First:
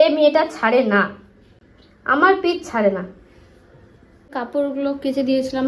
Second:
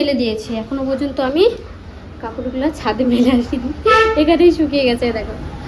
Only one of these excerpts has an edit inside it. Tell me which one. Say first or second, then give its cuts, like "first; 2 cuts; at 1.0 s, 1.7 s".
first; 1 cut; at 4.3 s